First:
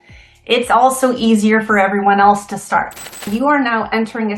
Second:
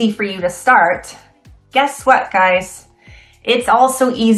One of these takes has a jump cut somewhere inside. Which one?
first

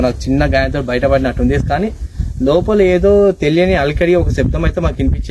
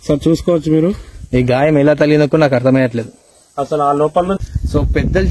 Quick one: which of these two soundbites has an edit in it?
second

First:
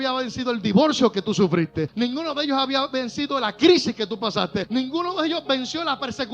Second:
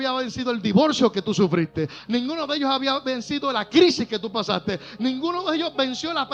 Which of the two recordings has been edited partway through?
first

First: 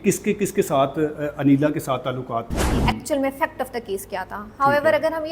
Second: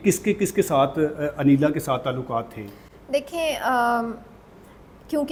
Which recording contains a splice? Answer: first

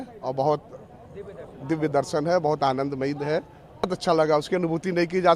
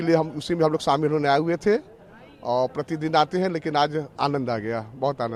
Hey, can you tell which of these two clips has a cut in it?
first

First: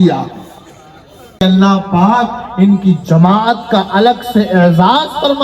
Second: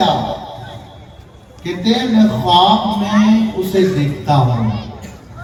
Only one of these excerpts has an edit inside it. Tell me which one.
first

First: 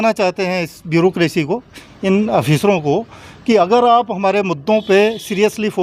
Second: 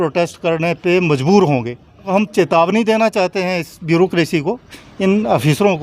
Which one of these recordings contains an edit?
second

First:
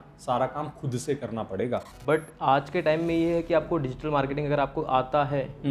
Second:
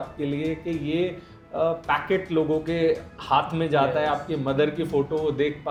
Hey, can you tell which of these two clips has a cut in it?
first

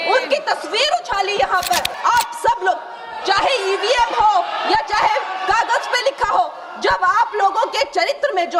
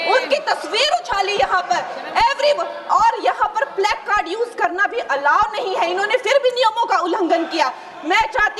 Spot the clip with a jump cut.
first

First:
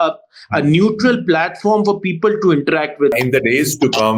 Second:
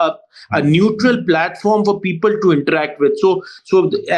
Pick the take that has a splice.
first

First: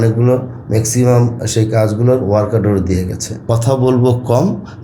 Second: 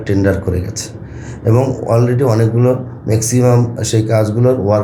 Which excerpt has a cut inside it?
first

